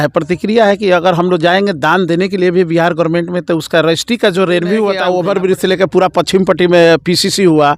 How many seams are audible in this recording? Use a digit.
1